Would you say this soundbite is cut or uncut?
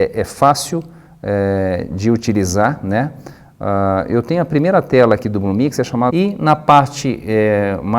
uncut